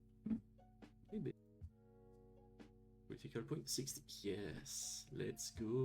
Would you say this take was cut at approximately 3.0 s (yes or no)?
no